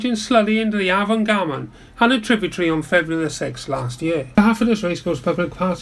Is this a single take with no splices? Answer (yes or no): no